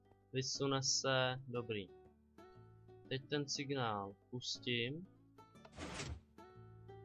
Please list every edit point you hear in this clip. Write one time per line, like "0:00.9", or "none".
none

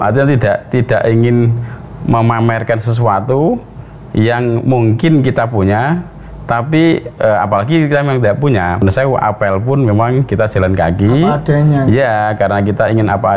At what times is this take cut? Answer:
0:08.8

